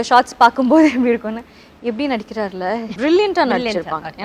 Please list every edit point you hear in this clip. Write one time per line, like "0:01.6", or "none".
0:03.0